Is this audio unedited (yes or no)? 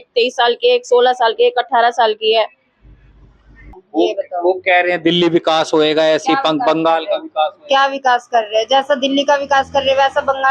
no